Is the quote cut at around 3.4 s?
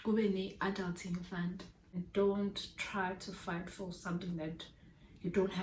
no; 1 cut; at 2.1 s

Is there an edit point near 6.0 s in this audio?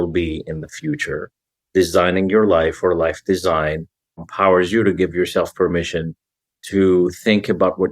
no; 1 cut; at 4.3 s

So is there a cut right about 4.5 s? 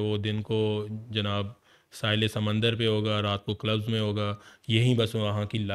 no; 0 cuts

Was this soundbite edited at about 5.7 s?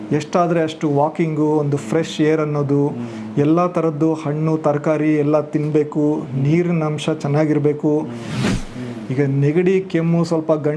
no; 1 cut; at 8.5 s

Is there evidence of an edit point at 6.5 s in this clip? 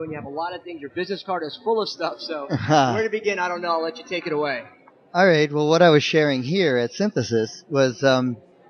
no; 1 cut; at 1.1 s

